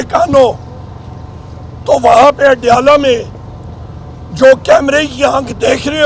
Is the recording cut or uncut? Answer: uncut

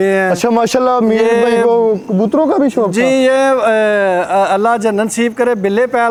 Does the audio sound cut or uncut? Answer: uncut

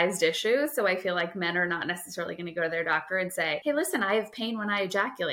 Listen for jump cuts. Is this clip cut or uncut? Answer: cut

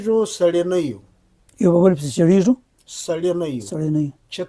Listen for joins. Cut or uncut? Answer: uncut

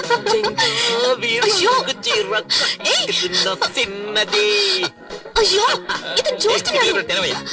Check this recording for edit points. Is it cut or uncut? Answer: uncut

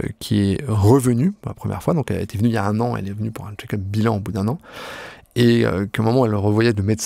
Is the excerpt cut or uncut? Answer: uncut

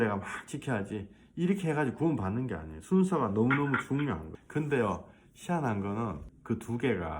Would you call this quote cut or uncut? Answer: cut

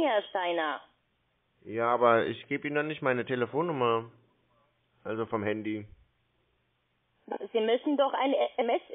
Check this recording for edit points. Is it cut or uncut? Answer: uncut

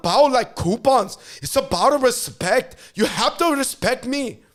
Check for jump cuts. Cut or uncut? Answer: uncut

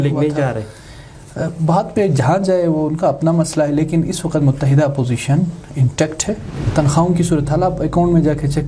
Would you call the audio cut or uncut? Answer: cut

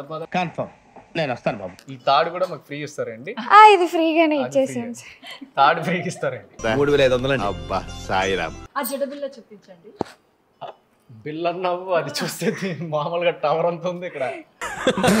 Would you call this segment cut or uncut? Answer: cut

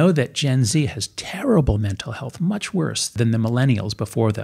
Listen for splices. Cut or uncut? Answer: cut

